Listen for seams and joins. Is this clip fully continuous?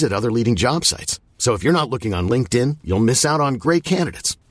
yes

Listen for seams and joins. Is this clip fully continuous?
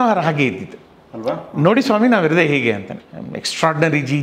no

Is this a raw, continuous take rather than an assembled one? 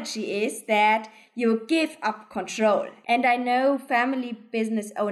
no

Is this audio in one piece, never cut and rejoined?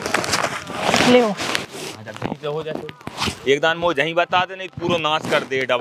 yes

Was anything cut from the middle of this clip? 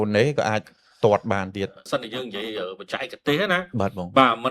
yes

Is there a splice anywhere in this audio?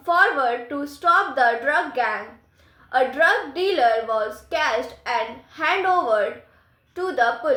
no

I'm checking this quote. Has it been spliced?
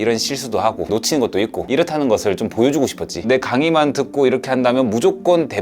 yes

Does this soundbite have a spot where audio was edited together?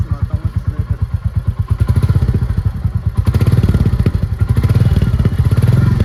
no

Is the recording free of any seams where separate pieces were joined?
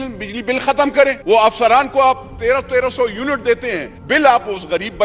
no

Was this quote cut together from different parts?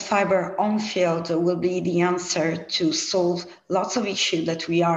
no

